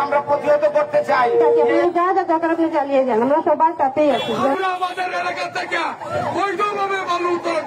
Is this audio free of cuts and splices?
no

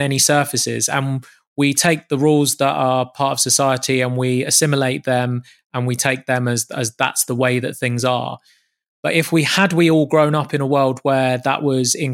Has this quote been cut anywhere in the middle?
no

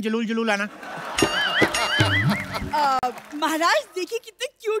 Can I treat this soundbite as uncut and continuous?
yes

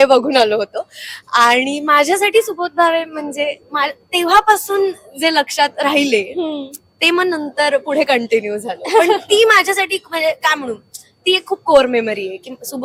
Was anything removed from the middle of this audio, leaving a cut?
no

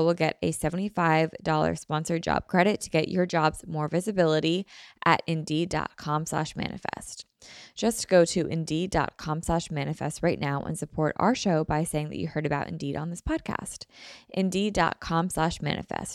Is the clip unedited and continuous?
yes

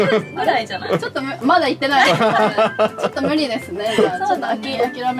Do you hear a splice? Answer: no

